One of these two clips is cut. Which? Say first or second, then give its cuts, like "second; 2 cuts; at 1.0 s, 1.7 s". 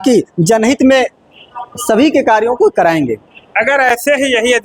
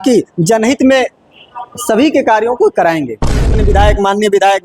second; 1 cut; at 3.5 s